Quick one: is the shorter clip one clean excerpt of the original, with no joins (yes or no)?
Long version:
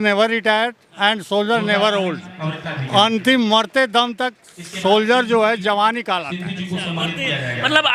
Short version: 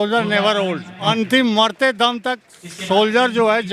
no